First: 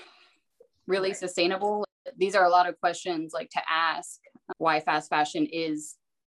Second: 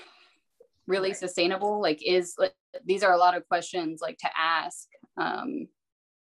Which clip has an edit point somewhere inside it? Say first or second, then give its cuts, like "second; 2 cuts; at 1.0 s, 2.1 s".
first; 2 cuts; at 1.8 s, 4.4 s